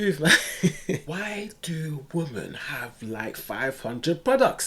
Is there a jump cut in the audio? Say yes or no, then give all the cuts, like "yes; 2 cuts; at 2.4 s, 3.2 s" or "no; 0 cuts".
yes; 1 cut; at 1.0 s